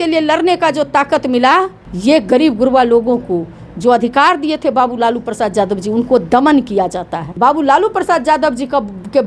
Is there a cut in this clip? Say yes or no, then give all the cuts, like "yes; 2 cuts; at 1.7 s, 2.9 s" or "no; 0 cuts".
yes; 2 cuts; at 1.8 s, 7.2 s